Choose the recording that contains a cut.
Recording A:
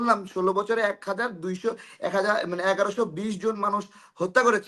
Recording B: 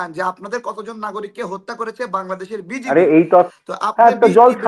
B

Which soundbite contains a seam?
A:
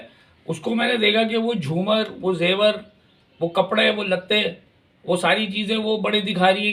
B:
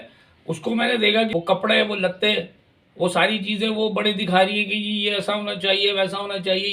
B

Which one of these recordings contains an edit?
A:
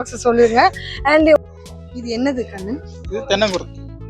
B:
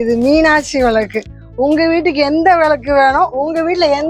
A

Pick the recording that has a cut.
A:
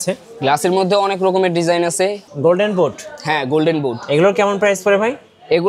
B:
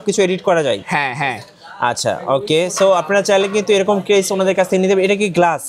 A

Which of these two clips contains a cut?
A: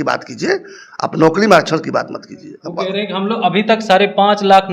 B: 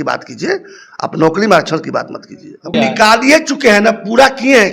B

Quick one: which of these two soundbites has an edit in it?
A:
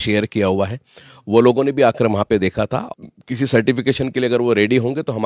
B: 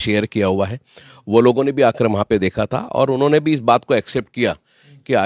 A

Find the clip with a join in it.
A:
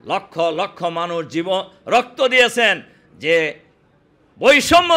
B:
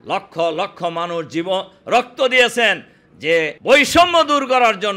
B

